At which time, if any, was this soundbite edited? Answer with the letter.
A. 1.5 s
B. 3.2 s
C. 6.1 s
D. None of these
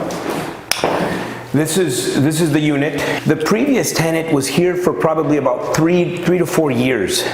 B